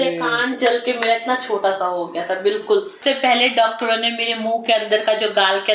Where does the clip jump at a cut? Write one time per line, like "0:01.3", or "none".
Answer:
0:03.0